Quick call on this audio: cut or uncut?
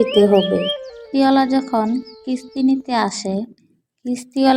cut